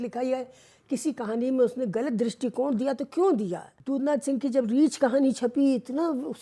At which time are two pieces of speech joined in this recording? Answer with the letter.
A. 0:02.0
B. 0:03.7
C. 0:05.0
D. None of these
B